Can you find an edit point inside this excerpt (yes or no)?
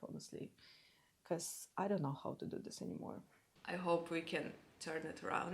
yes